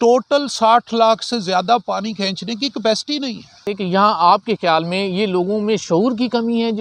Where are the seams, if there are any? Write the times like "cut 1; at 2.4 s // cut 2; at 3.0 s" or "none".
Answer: cut 1; at 3.7 s